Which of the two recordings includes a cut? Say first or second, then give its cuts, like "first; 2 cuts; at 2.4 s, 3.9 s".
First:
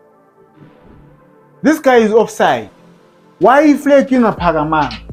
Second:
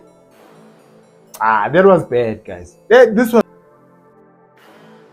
second; 1 cut; at 3.5 s